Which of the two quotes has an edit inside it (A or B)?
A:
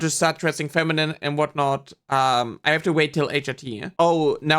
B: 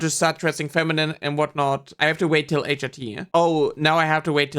B